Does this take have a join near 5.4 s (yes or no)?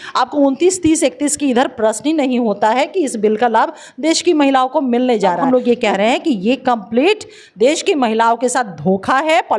yes